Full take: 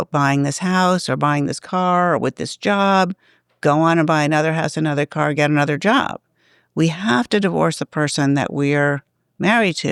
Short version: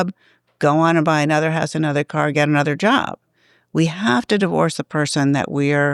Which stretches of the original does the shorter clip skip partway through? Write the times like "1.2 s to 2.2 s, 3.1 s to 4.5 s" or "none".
none